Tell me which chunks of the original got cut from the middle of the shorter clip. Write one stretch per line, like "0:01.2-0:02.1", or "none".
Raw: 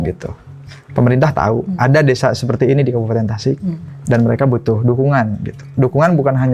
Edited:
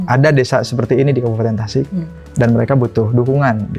none